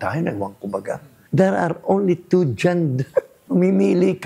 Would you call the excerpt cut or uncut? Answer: cut